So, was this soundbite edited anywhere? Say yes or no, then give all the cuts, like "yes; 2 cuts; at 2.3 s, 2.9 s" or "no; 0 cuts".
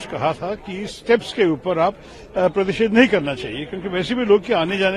no; 0 cuts